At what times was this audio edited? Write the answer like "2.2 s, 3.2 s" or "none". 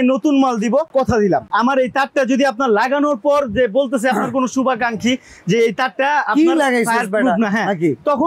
1.4 s